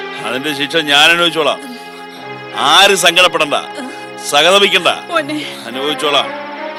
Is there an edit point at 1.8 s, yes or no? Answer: no